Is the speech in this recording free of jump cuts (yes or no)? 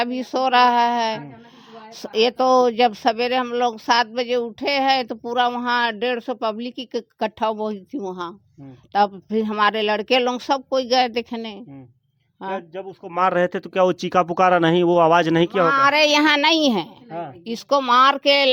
yes